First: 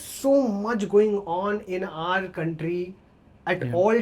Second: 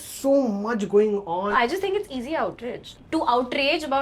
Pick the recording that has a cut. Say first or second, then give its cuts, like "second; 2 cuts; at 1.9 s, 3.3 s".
second; 2 cuts; at 1.5 s, 2.9 s